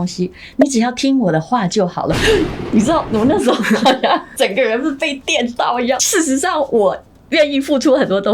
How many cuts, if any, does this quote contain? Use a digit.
1